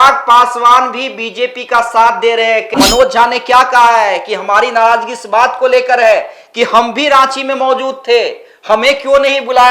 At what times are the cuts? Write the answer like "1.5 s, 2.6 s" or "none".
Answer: 2.7 s